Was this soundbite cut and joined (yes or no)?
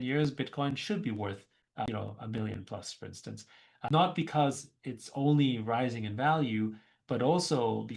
yes